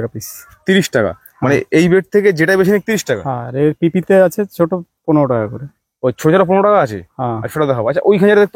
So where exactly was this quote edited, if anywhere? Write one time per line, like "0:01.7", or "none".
none